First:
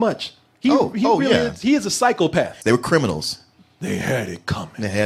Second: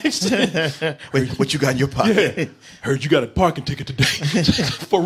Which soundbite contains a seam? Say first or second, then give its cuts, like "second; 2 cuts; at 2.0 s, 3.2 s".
first; 1 cut; at 2.5 s